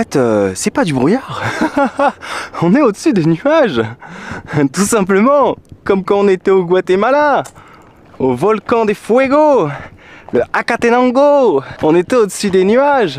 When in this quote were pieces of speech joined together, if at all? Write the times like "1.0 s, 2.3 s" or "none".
none